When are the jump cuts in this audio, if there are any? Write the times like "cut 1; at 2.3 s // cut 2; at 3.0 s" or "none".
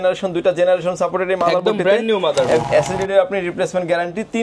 cut 1; at 2.6 s